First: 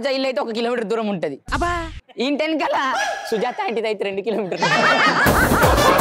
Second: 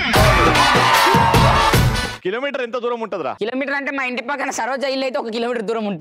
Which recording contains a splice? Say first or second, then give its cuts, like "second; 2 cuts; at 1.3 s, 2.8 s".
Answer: second; 2 cuts; at 2.1 s, 3.4 s